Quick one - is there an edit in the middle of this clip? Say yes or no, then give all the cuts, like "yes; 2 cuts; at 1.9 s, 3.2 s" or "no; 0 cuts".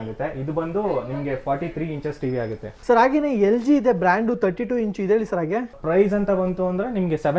yes; 2 cuts; at 2.7 s, 5.8 s